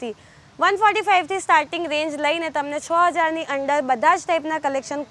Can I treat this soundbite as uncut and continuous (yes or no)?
yes